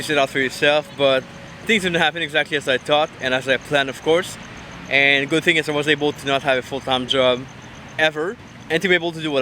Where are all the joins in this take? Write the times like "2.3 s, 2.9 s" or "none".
1.6 s, 8.5 s